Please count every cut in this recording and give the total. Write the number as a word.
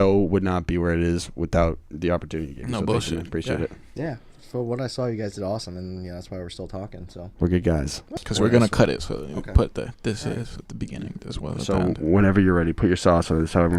one